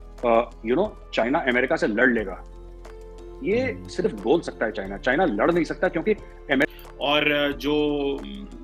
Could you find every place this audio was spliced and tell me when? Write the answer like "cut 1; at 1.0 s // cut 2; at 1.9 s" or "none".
cut 1; at 6.7 s